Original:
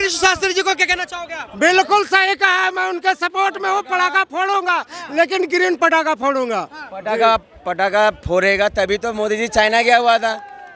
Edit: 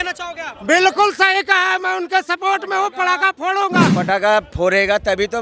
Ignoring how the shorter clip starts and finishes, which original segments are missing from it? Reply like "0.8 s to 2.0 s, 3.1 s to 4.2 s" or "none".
4.9 s to 7.7 s

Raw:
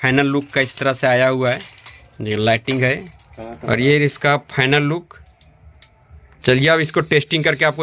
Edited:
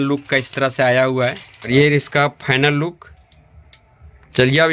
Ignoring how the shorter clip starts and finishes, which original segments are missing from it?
1.9 s to 3.8 s

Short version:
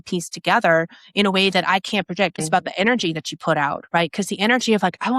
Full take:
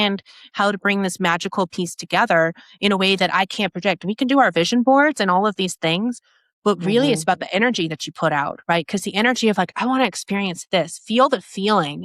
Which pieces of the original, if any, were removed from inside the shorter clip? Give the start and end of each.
4.1 s to 7.2 s

